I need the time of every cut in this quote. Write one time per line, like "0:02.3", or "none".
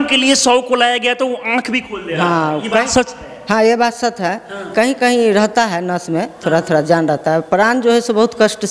none